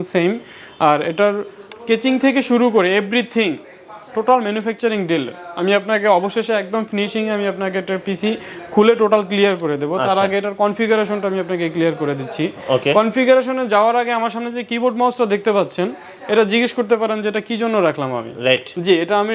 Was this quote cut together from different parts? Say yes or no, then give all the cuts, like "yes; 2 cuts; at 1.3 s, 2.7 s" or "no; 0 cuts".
no; 0 cuts